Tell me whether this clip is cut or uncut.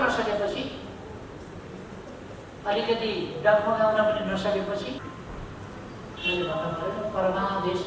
cut